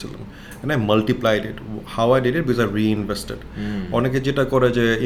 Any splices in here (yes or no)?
no